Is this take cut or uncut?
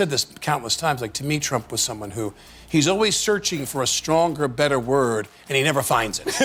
uncut